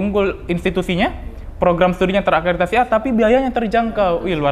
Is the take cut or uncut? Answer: uncut